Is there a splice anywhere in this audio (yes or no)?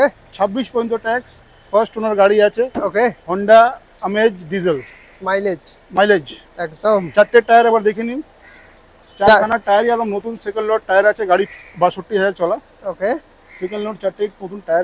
no